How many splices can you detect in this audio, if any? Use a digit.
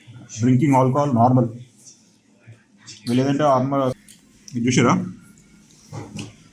1